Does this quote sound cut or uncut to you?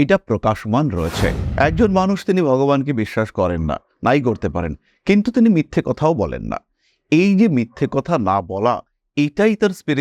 cut